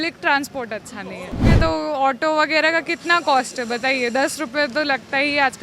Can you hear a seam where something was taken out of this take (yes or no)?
yes